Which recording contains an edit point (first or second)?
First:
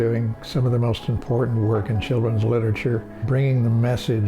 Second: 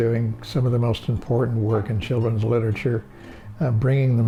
first